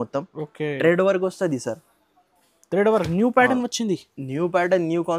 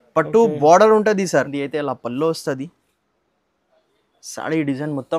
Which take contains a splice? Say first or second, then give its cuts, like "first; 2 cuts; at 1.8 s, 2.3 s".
second; 1 cut; at 1.6 s